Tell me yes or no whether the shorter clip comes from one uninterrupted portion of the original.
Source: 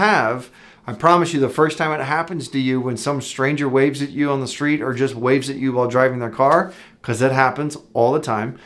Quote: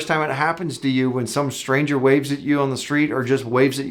yes